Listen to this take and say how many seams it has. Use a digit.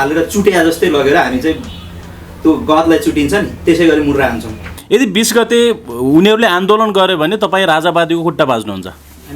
1